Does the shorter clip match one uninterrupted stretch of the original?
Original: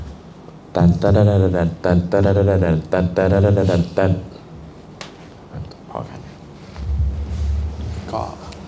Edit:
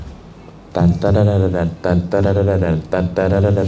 yes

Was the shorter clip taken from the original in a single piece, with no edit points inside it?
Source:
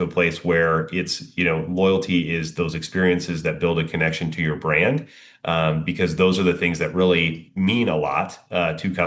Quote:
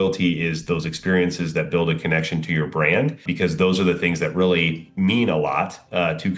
no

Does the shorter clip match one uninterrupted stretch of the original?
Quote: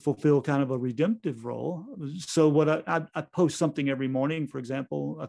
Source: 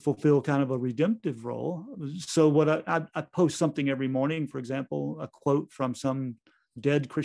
yes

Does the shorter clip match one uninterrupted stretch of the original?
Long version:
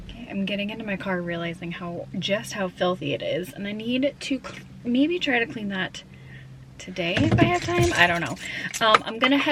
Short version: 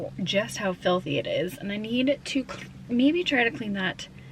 yes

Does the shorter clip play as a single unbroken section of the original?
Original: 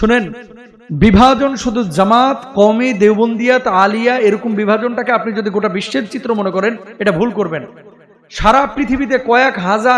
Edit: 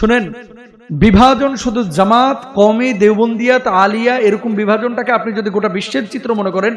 yes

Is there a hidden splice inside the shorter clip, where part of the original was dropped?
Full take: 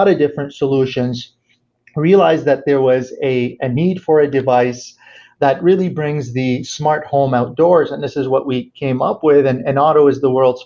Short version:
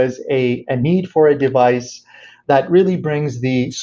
no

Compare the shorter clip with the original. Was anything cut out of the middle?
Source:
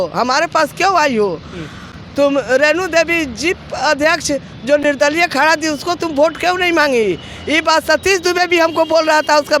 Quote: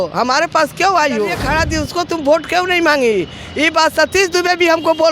yes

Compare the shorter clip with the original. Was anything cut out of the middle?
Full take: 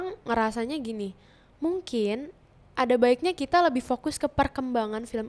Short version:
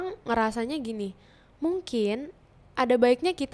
no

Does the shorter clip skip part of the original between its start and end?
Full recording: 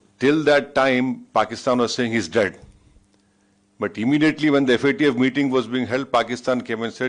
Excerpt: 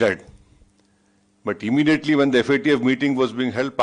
no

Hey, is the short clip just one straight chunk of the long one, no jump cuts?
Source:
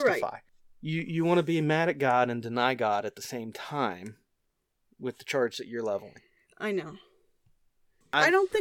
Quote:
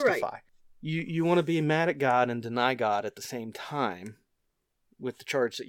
yes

